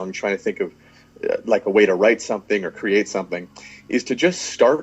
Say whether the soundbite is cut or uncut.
uncut